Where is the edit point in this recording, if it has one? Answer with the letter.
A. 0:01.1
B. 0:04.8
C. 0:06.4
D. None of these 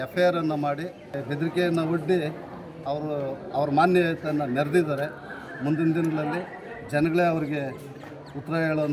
A